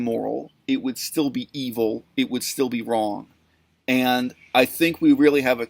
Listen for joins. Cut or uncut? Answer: uncut